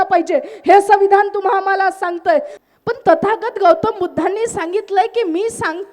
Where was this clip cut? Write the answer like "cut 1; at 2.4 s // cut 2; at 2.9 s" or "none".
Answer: cut 1; at 2.5 s